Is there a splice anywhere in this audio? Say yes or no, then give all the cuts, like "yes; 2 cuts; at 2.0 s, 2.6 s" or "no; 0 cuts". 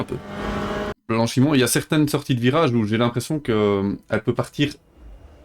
yes; 1 cut; at 0.9 s